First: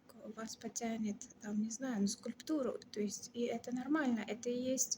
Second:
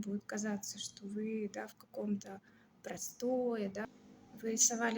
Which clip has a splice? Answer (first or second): second